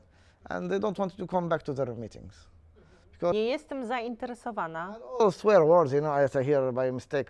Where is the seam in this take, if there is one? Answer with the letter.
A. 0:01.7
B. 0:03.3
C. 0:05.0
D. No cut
B